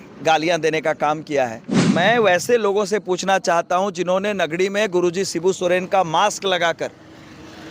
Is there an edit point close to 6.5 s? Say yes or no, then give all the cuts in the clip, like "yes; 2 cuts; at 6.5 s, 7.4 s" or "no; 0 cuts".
no; 1 cut; at 1.7 s